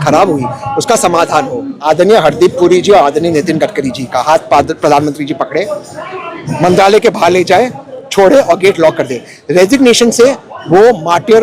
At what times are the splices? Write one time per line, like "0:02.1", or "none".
0:01.8